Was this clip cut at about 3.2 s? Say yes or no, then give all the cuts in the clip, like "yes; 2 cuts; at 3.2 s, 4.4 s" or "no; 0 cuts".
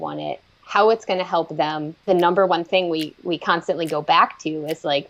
no; 1 cut; at 2.0 s